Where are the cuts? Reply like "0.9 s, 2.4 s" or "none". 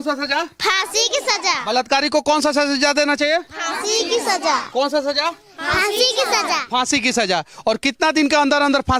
none